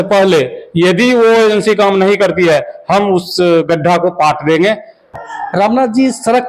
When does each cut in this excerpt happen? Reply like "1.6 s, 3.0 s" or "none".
5.1 s